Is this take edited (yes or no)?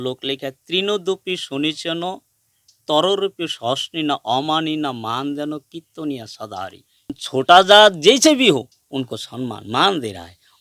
yes